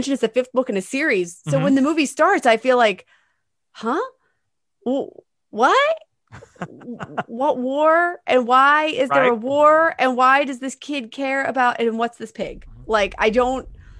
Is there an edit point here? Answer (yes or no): no